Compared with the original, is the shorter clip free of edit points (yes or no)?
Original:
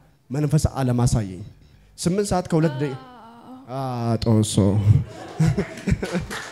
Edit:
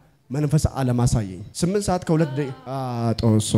no